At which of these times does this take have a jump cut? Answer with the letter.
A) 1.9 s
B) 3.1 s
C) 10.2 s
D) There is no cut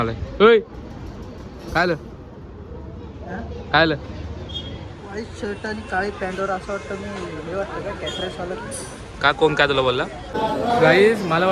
C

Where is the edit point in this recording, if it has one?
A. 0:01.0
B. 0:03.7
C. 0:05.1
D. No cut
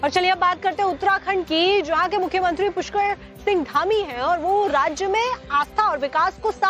A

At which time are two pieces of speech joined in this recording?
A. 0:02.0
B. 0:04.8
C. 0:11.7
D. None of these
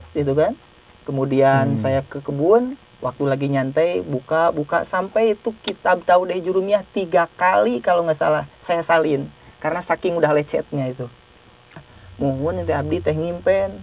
C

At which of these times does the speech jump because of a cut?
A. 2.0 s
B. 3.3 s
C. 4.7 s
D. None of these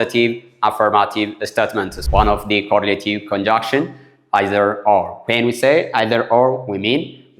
A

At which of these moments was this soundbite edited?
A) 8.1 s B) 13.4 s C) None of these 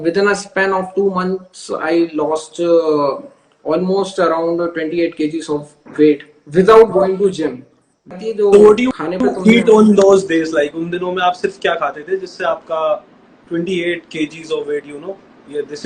A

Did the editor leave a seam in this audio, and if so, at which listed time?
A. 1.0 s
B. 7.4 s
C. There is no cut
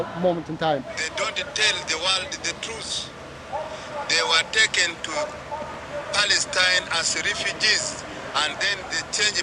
A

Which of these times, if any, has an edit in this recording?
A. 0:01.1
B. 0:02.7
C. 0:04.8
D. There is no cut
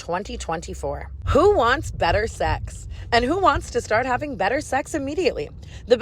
A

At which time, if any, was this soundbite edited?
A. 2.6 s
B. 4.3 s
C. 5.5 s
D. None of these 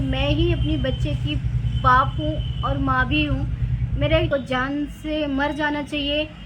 B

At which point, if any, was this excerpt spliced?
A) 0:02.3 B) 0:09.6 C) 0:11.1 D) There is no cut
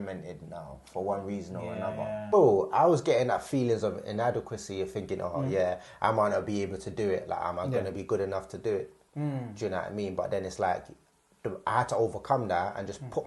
A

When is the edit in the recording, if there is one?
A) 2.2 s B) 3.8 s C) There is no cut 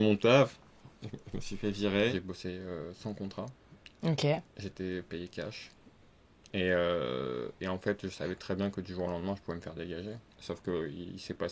A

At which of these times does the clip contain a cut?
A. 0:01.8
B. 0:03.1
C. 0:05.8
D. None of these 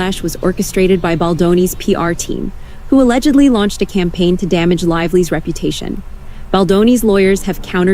C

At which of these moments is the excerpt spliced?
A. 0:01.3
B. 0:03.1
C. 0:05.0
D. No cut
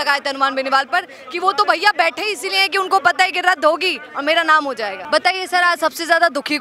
C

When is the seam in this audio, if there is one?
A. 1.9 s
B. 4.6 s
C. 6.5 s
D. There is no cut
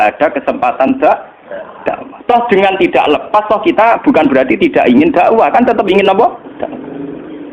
C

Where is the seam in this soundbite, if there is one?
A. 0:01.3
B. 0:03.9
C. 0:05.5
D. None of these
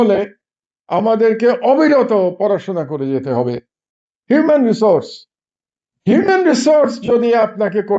B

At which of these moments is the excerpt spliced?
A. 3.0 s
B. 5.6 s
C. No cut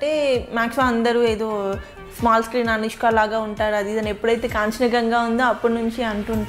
C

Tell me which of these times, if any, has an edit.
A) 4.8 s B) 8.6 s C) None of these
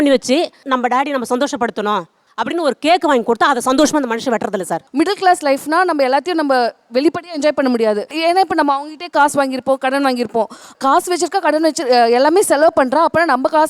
A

